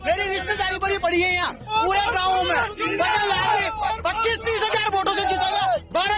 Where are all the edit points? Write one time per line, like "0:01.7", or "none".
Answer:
none